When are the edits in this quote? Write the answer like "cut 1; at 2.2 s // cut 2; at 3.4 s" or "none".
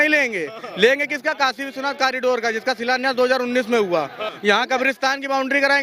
cut 1; at 4.3 s